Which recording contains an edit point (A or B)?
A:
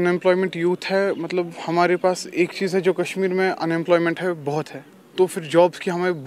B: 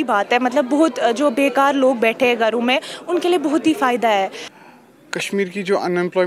B